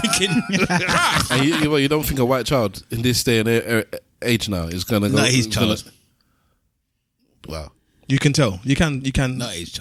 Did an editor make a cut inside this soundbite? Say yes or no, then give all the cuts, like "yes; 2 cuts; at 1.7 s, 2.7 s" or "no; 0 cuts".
no; 0 cuts